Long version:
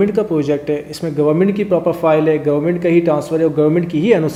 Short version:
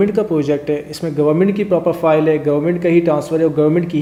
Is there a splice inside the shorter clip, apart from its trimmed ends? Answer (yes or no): no